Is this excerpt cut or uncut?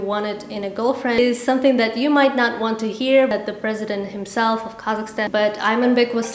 cut